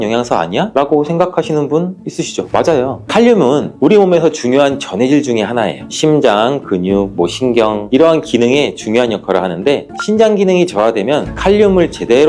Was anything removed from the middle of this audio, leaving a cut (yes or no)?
yes